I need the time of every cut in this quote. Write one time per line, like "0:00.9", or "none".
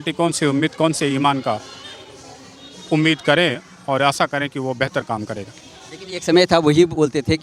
none